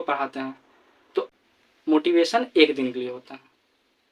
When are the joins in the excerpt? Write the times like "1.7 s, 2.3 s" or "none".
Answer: 1.3 s

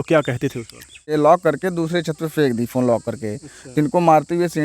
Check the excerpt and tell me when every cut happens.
1.1 s

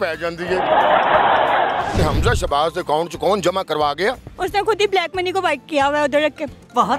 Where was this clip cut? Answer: 2.0 s, 4.3 s

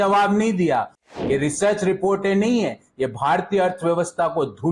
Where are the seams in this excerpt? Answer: 1.0 s

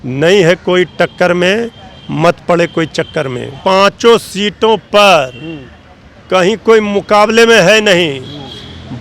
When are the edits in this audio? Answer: 3.6 s

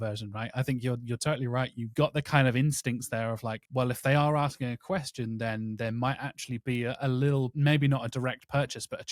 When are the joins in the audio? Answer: none

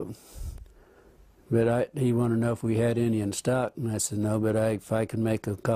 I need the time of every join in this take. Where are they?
1.8 s

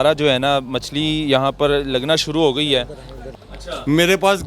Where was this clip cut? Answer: 3.2 s

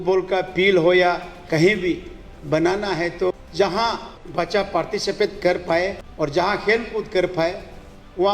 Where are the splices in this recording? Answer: 3.3 s, 4.1 s, 6.0 s

